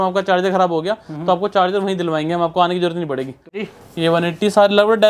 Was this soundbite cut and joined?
yes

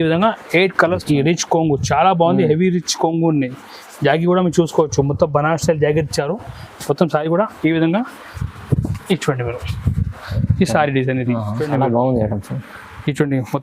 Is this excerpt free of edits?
no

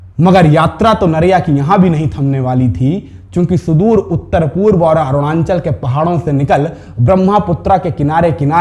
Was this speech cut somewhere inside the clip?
no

